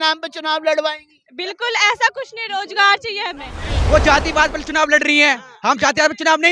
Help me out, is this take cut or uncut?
cut